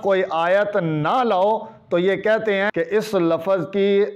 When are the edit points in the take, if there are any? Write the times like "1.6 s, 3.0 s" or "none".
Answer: 2.7 s